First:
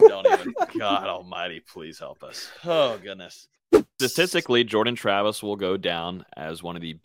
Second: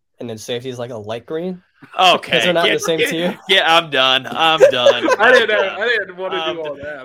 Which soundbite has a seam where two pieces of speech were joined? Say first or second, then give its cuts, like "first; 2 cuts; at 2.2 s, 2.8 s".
first; 1 cut; at 3.9 s